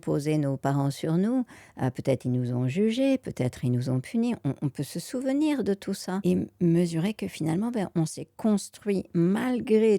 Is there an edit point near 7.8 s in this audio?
no; 1 cut; at 6.2 s

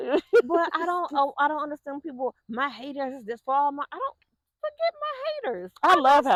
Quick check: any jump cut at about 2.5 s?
no; 0 cuts

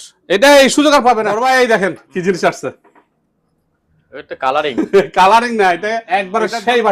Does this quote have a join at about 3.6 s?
no; 2 cuts; at 1.3 s, 6.0 s

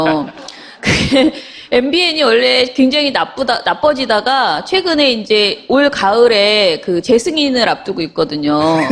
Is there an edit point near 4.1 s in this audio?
yes; 1 cut; at 4.1 s

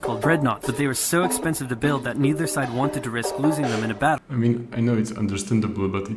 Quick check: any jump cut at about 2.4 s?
no; 1 cut; at 4.2 s

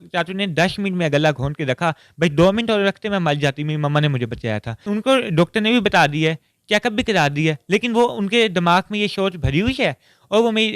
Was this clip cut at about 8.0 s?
no; 1 cut; at 4.9 s

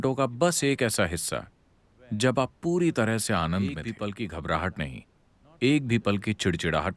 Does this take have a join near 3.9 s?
yes; 1 cut; at 3.9 s

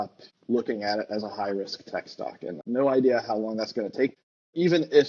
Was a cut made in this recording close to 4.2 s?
yes; 2 cuts; at 2.5 s, 4.2 s

